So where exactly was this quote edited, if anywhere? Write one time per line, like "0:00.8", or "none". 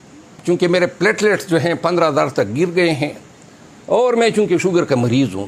none